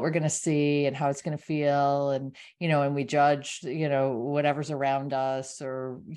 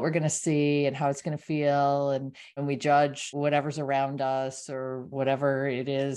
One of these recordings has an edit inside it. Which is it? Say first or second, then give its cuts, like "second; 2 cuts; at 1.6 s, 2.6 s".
second; 3 cuts; at 2.6 s, 3.3 s, 5.1 s